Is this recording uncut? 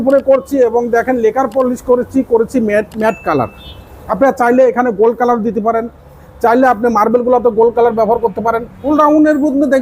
no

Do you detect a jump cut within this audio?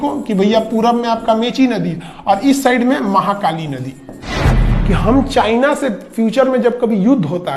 yes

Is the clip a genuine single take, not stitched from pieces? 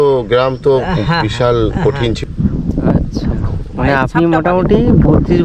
no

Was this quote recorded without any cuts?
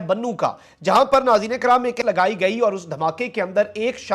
no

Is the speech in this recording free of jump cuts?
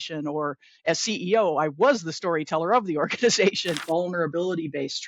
no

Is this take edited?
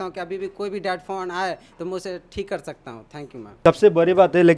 yes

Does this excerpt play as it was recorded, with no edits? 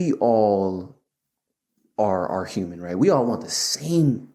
yes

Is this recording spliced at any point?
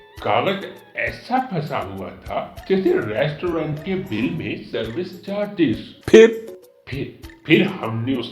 yes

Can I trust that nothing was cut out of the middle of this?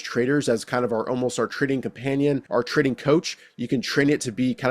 no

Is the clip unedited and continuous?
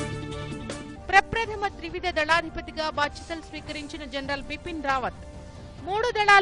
no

